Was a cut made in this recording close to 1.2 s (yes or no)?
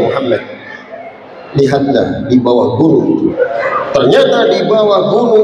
no